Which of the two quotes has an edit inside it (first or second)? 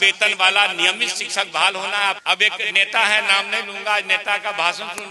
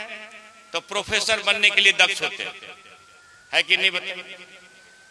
first